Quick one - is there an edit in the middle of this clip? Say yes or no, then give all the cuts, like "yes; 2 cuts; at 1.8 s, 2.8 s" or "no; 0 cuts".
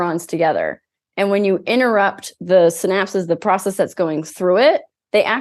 no; 0 cuts